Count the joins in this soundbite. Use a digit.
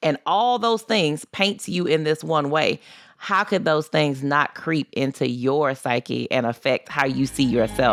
0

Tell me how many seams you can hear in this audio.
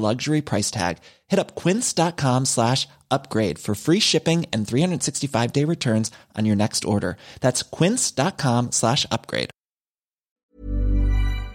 1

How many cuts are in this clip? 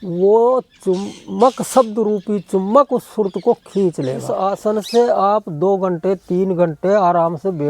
1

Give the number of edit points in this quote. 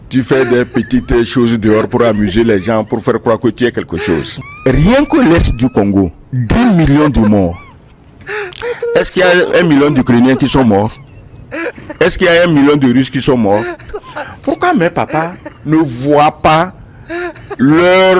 2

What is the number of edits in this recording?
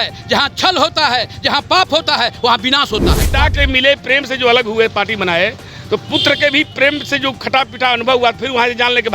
1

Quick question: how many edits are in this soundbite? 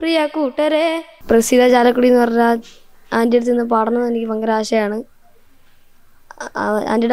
1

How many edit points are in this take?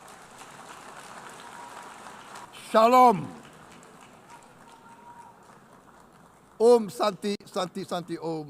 1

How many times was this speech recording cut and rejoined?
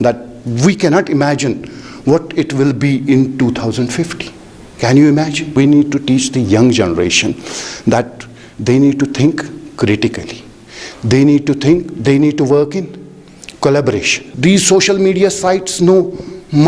2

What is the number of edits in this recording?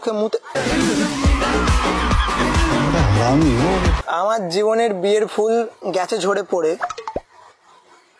1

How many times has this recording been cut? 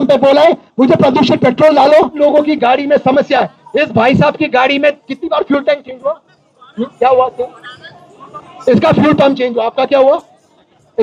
1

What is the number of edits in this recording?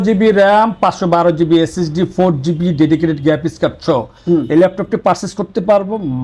0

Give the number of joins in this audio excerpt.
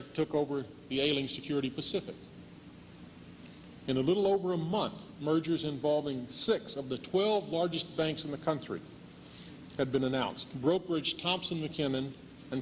0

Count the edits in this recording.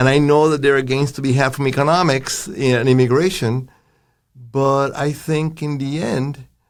0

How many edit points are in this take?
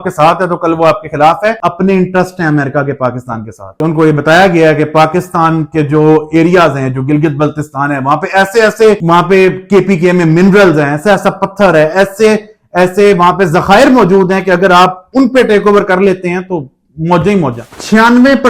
2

